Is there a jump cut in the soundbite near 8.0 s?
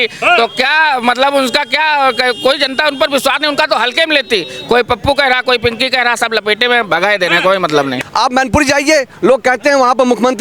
yes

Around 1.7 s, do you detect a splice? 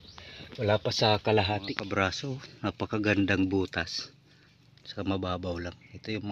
yes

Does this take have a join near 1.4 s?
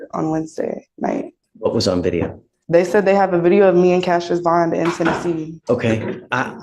yes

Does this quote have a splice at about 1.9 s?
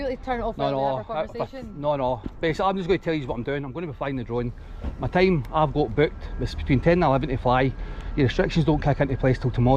no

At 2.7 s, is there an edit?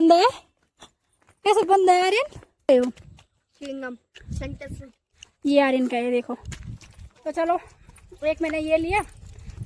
yes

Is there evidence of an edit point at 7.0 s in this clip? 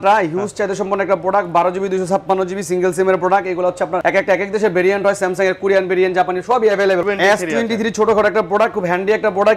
yes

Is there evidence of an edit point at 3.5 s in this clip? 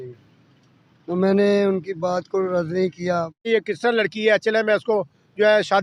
yes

